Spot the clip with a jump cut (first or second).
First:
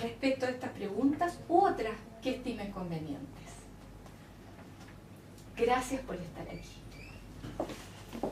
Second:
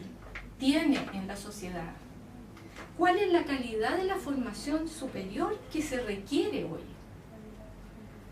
second